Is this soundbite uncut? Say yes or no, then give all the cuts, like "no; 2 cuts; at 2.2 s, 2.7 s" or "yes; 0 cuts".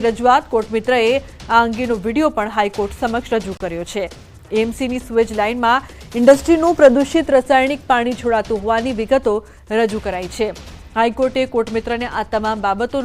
no; 1 cut; at 12.1 s